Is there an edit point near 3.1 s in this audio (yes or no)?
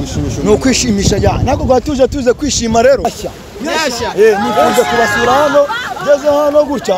yes